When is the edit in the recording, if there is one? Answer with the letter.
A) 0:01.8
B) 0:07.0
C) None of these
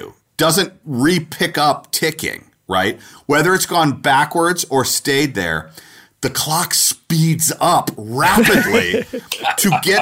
C